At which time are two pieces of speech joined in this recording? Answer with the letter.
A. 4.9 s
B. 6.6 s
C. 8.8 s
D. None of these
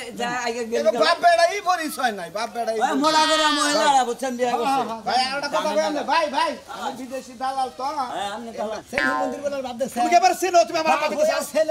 C